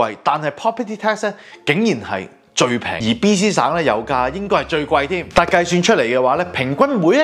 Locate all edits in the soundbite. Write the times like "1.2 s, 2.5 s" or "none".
2.9 s